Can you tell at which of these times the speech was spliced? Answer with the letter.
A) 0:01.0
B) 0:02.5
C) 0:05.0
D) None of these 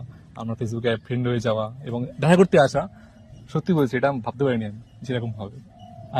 D